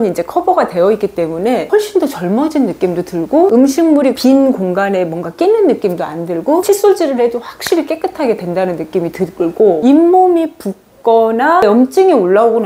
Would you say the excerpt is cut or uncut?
cut